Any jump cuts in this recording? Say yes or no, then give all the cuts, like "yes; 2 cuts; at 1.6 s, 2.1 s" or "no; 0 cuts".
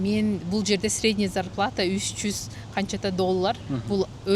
no; 0 cuts